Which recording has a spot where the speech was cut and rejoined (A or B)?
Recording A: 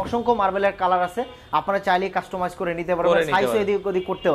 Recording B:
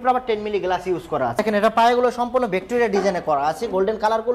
B